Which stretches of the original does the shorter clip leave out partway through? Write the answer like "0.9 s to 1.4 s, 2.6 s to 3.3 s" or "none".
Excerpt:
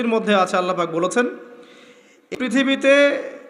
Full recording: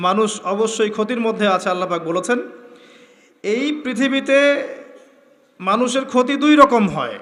3.4 s to 3.8 s